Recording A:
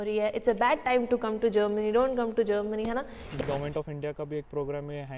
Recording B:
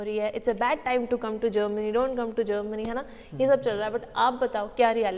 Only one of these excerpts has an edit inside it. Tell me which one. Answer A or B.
A